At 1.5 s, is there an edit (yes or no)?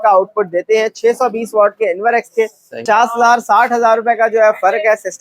no